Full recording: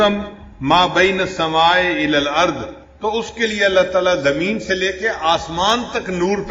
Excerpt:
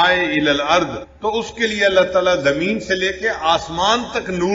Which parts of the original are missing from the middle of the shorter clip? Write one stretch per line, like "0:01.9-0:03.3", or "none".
0:02.7-0:02.8